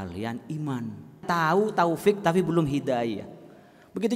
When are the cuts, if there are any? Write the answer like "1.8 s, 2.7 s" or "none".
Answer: 1.2 s